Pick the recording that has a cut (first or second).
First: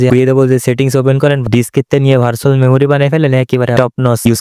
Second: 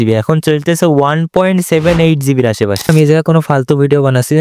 second